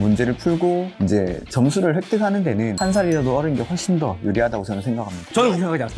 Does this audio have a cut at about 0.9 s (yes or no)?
yes